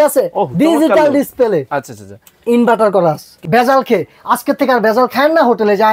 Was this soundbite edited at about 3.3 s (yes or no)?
yes